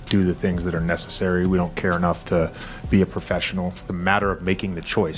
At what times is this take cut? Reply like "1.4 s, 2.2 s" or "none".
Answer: 3.8 s